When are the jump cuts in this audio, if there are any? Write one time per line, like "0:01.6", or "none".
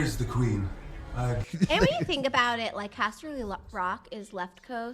0:01.4